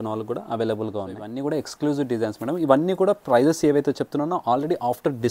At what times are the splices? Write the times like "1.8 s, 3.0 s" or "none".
1.3 s